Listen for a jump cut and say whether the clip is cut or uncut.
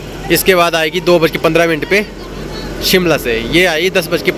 uncut